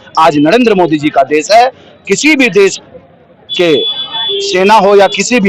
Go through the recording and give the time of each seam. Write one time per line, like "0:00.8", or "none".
none